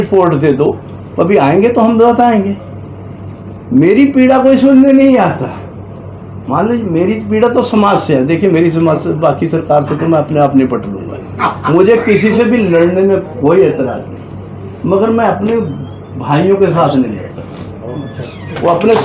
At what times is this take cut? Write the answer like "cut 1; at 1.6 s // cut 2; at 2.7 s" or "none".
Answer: none